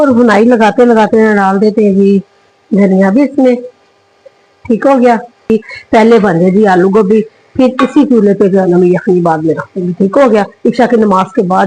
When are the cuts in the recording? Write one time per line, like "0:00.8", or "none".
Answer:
0:05.5